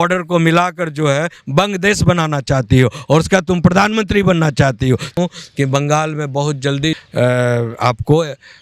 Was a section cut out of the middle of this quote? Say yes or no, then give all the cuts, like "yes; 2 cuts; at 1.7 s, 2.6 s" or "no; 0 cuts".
yes; 2 cuts; at 5.2 s, 7.0 s